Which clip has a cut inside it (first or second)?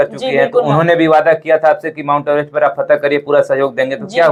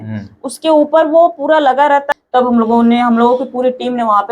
second